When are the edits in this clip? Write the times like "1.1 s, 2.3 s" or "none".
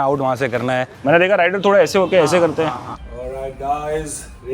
0.9 s, 2.9 s